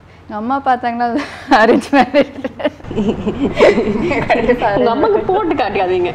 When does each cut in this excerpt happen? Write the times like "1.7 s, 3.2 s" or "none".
none

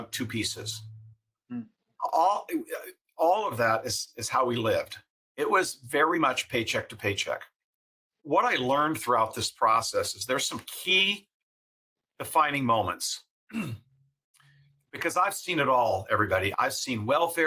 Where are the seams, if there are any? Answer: 8.1 s, 16.5 s

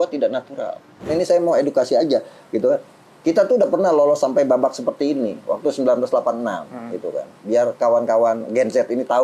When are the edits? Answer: 1.1 s

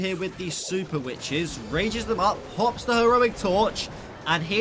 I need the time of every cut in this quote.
none

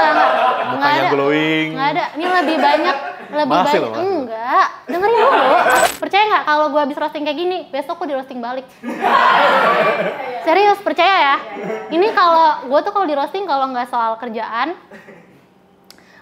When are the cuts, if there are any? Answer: 5.9 s

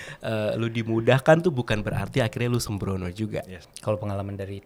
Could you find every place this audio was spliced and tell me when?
3.6 s

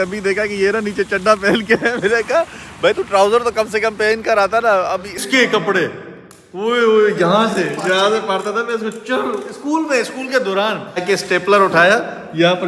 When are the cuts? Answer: 5.2 s, 11.0 s

